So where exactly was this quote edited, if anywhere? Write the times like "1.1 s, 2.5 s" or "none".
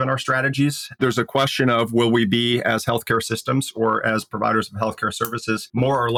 none